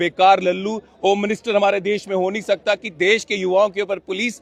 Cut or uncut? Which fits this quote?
uncut